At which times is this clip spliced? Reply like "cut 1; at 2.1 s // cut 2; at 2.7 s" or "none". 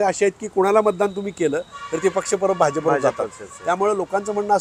none